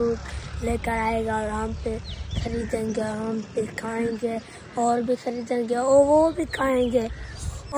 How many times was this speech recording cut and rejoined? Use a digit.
0